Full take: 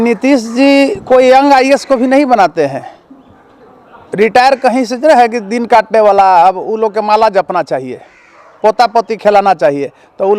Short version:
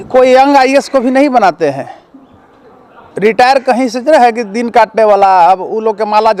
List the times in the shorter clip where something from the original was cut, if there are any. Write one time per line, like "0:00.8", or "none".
none